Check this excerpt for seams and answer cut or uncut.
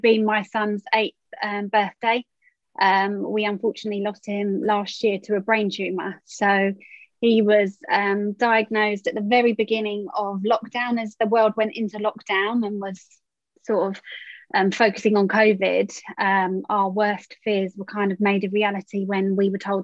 uncut